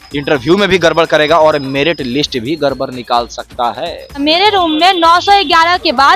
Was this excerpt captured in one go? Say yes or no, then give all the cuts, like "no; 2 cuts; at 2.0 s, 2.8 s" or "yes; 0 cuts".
no; 1 cut; at 4.2 s